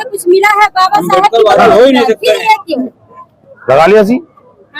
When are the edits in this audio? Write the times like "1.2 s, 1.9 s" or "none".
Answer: none